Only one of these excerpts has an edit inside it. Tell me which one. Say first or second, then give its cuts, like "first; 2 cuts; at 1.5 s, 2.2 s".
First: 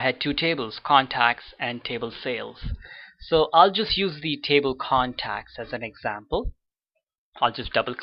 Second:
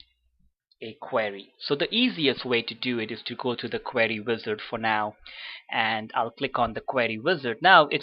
second; 1 cut; at 3.2 s